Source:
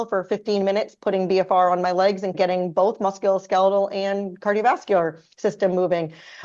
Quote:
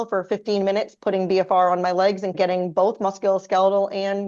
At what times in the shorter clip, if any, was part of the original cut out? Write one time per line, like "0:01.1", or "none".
none